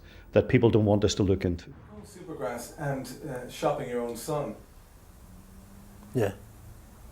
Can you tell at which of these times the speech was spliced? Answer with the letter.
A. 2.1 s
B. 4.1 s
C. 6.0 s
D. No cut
A